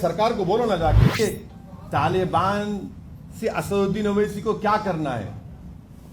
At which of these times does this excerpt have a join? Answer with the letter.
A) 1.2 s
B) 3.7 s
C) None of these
A